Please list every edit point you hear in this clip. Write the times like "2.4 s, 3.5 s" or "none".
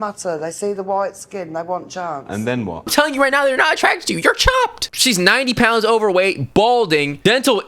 2.9 s, 4.9 s